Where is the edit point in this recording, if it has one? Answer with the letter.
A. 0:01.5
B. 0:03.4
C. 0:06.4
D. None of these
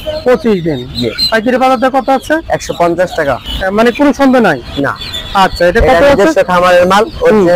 B